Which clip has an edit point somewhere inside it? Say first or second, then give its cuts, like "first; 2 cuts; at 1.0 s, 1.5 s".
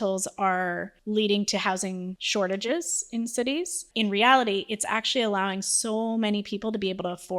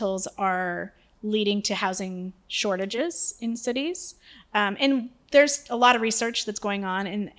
first; 3 cuts; at 0.9 s, 2.2 s, 3.8 s